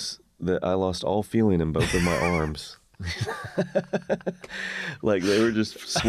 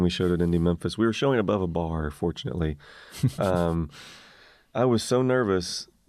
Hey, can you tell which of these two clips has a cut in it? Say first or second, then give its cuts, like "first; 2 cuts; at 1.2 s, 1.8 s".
second; 1 cut; at 4.6 s